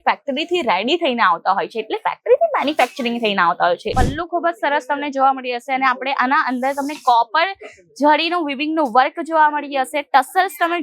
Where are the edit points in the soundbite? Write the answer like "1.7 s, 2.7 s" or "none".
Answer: 3.9 s